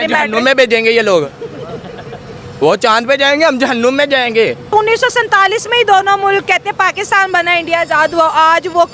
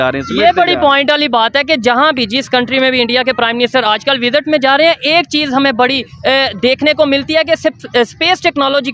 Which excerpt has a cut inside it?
first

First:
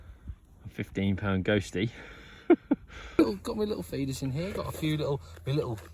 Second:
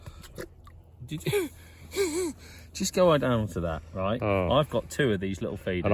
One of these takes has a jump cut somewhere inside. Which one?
first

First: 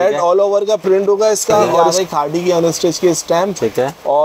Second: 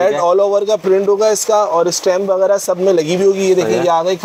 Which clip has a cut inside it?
first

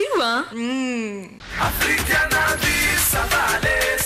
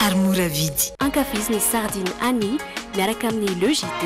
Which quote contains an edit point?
first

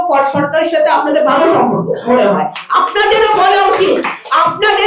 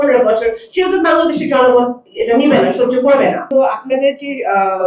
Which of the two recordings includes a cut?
second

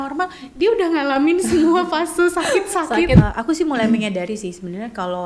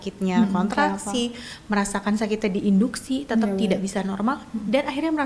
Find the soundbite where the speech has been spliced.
first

